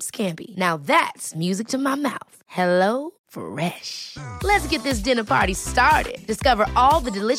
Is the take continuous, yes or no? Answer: yes